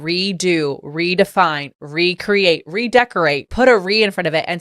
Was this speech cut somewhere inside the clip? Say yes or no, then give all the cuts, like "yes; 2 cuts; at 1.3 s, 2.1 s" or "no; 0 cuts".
no; 0 cuts